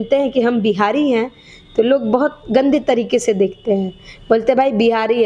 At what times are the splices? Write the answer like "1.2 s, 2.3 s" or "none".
none

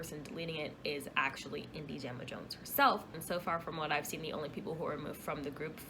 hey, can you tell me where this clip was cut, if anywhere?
3.2 s

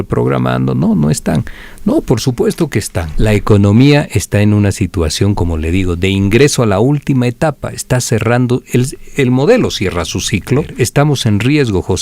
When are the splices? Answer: 3.0 s, 10.7 s

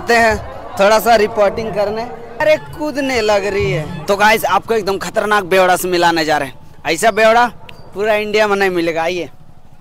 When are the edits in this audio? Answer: 2.4 s, 3.9 s

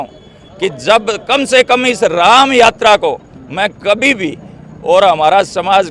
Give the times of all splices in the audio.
none

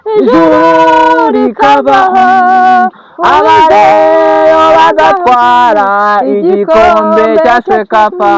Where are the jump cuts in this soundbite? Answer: none

